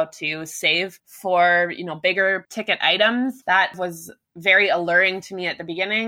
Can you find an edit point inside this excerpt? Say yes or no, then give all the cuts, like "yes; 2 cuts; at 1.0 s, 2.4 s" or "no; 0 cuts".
yes; 3 cuts; at 1.0 s, 2.5 s, 3.8 s